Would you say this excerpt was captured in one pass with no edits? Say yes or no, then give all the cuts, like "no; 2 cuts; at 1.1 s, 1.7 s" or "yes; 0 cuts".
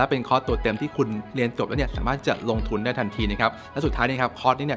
yes; 0 cuts